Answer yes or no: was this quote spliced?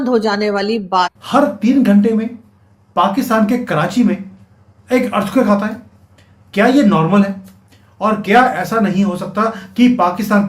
yes